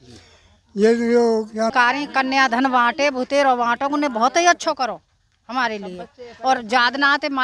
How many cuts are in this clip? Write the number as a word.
one